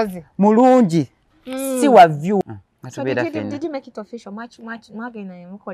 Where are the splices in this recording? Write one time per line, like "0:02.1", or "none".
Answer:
0:02.4